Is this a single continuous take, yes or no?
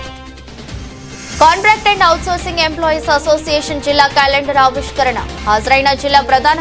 yes